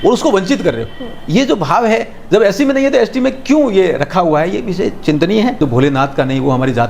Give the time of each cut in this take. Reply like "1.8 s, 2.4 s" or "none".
5.6 s